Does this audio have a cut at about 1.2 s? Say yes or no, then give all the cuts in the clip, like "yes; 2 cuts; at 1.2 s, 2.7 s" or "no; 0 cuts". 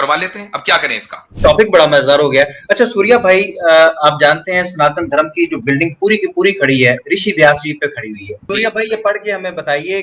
yes; 2 cuts; at 1.2 s, 8.4 s